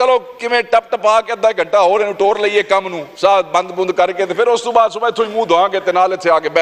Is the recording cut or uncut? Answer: uncut